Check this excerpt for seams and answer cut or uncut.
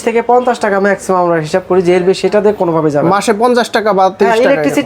uncut